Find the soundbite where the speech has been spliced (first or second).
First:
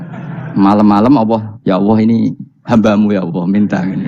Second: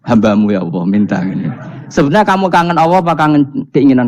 first